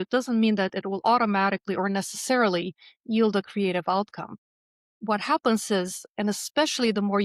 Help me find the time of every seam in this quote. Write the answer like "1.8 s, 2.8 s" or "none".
none